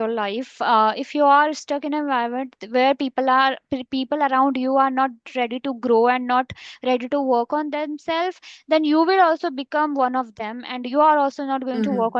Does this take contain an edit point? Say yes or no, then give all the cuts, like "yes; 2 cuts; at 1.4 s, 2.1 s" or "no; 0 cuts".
no; 0 cuts